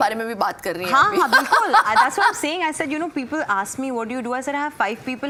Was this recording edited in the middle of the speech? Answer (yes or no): no